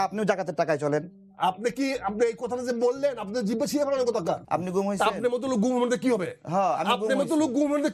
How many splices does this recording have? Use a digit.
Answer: 2